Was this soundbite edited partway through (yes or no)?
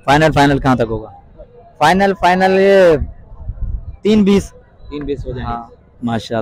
no